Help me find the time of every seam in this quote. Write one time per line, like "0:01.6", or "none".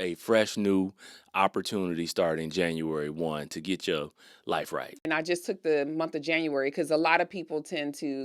0:04.9

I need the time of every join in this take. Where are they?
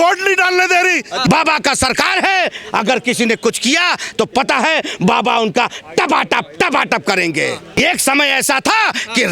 0:01.2
0:07.8

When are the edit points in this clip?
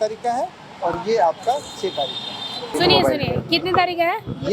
0:02.7

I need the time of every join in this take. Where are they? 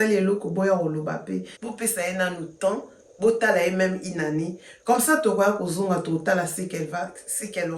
0:01.5

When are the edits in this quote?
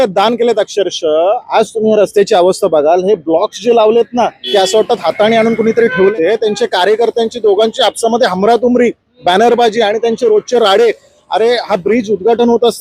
0:06.1

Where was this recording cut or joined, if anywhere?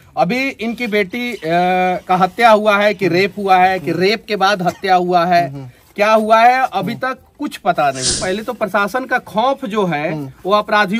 0:08.1

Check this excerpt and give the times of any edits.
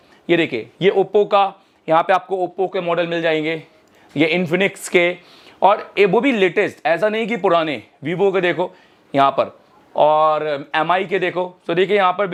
none

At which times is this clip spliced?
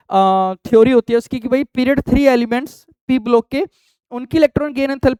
none

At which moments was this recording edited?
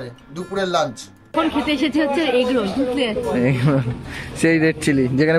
0:01.3

